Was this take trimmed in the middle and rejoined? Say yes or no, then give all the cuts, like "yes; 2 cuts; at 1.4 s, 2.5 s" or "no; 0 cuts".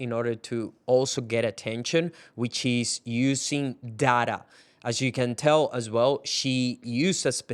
no; 0 cuts